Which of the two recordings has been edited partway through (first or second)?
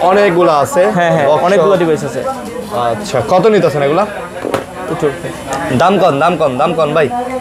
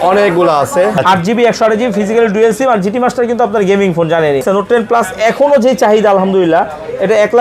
second